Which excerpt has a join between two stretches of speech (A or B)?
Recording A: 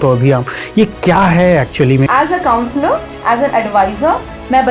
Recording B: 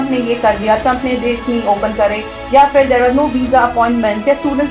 A